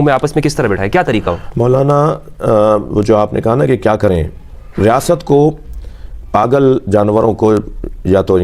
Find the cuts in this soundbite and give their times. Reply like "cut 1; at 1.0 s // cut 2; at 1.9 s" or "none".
none